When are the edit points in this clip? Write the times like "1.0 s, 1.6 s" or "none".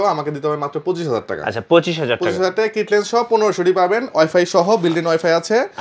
none